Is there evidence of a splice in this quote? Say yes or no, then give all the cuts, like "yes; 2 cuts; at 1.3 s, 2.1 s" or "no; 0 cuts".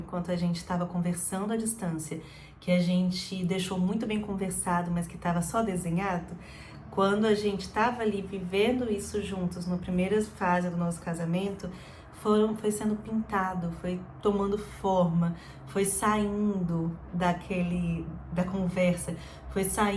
no; 0 cuts